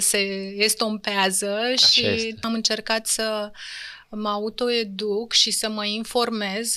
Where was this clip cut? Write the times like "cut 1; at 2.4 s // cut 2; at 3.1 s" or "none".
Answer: cut 1; at 2.4 s